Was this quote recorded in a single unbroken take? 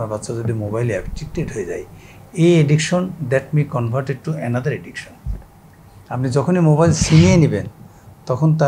yes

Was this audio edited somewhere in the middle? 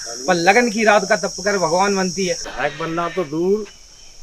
yes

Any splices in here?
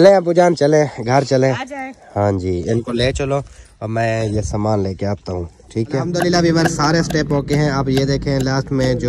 yes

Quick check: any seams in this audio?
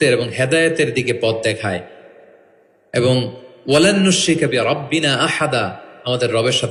no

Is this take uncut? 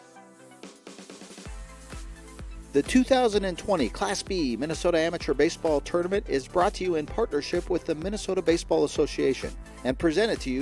no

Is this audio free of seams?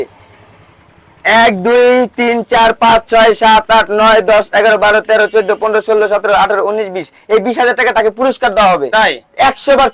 yes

